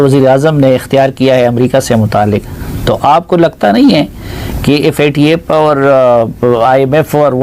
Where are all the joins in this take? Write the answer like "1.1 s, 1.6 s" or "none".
none